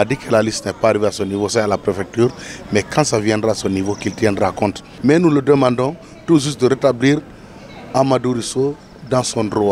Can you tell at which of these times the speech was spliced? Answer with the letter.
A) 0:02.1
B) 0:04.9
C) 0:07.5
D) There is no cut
B